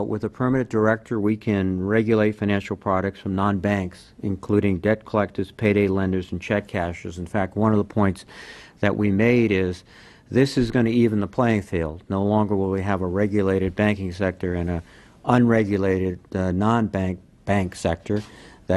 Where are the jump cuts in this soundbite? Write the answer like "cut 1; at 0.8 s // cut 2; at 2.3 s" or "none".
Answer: cut 1; at 16.6 s